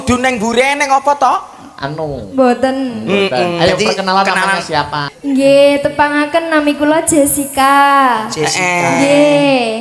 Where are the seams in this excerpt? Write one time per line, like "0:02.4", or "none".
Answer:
0:05.1